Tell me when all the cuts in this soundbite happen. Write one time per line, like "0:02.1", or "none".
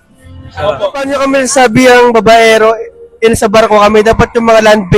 0:01.2